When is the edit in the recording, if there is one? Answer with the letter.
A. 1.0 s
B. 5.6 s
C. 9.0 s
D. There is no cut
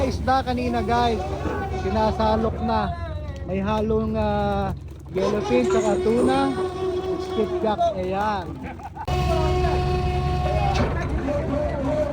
C